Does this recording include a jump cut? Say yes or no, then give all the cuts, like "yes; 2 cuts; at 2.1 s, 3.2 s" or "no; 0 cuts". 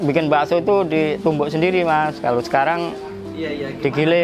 no; 0 cuts